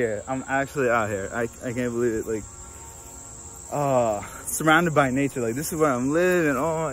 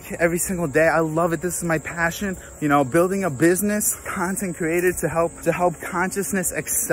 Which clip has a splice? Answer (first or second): second